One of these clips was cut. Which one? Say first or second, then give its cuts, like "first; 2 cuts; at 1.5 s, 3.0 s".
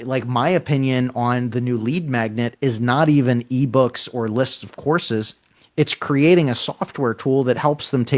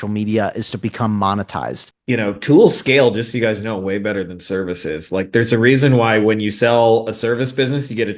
second; 1 cut; at 1.9 s